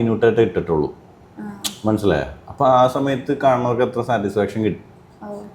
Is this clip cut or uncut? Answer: uncut